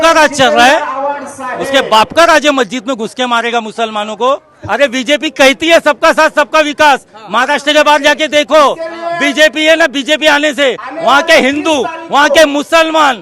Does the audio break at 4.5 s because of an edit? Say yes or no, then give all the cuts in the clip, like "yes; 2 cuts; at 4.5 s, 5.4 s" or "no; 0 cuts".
yes; 1 cut; at 4.5 s